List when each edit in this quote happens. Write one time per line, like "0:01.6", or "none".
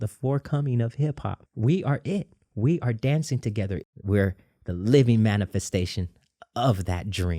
0:01.4
0:03.8